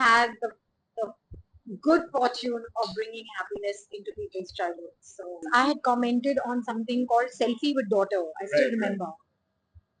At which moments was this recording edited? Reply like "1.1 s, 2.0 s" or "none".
5.5 s